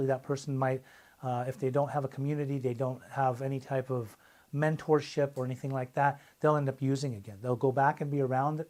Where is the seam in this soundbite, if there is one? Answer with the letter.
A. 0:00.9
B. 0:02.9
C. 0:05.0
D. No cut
D